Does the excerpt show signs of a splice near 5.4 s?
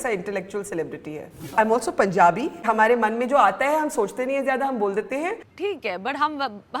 yes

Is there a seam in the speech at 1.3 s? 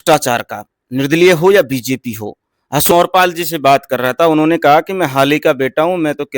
no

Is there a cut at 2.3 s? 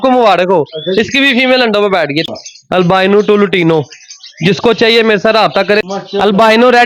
yes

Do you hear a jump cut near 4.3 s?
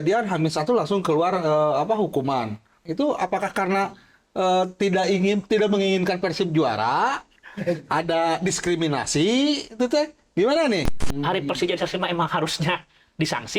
no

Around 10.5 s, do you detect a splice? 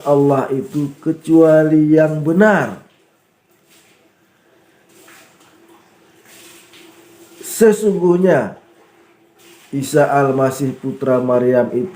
no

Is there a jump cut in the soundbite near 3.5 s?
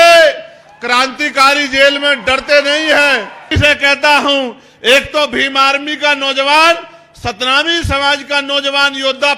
yes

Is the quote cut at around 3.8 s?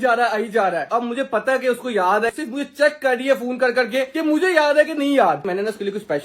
no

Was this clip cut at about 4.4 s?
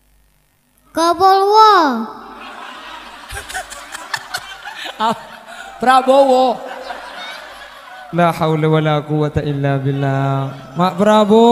no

